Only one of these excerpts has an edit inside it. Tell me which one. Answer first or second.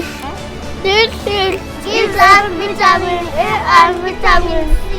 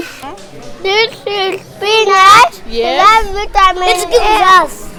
first